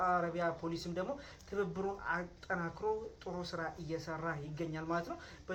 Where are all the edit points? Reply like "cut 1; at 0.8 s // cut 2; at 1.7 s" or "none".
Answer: none